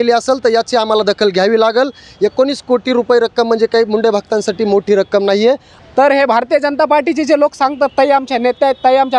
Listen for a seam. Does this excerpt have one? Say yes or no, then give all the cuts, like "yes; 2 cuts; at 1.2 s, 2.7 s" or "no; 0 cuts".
yes; 1 cut; at 5.7 s